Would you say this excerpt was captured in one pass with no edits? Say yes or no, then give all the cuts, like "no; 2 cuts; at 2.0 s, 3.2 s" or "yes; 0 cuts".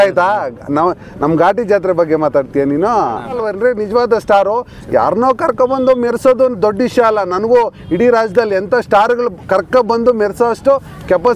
no; 1 cut; at 3.4 s